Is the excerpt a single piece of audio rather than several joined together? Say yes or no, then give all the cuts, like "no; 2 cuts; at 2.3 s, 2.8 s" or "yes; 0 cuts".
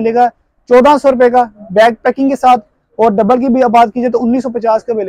yes; 0 cuts